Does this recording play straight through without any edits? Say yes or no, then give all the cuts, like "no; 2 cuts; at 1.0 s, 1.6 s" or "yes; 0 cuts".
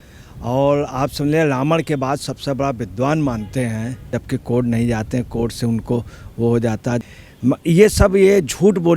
no; 2 cuts; at 4.2 s, 7.1 s